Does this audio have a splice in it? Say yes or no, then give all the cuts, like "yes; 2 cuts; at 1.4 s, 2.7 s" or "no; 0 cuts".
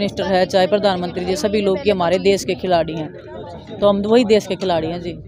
no; 0 cuts